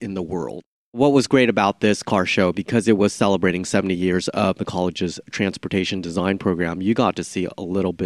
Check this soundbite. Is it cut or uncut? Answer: cut